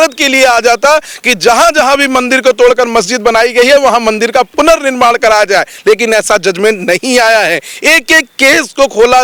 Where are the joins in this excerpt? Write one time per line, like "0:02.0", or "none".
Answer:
none